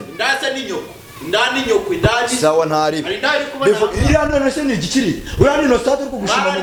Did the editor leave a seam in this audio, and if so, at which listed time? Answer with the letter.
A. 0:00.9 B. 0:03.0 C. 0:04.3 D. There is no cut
D